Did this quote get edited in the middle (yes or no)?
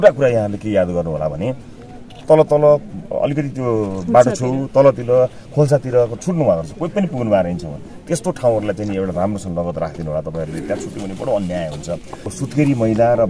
yes